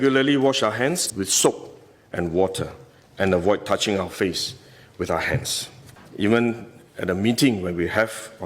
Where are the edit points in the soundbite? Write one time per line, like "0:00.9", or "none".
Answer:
0:01.1
0:06.0

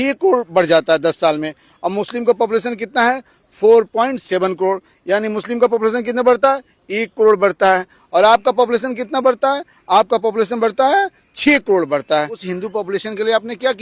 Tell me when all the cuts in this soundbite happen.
0:12.4

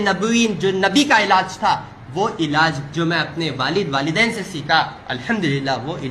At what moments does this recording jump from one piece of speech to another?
0:05.1

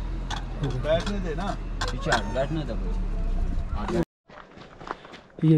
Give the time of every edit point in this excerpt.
0:04.0

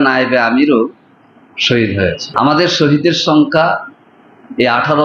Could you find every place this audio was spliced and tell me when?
0:02.2

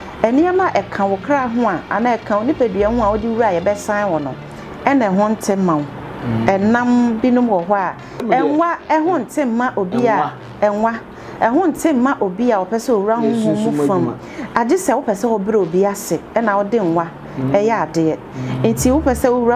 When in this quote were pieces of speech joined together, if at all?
0:08.2

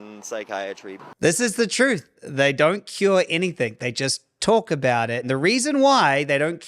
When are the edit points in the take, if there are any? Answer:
0:01.1
0:05.2

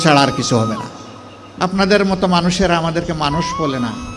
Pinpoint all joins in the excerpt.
0:01.4

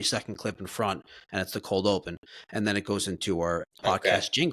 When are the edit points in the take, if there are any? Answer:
0:03.6

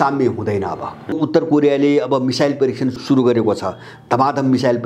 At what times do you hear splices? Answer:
0:01.2
0:03.0

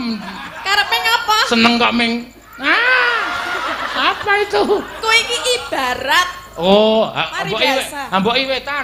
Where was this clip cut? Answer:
none

